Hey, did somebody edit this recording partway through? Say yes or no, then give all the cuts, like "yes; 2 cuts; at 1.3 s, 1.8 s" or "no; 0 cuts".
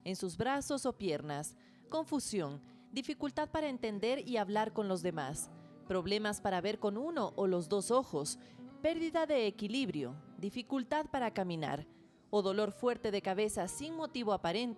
no; 0 cuts